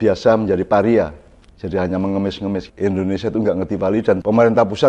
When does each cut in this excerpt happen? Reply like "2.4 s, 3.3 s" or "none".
2.7 s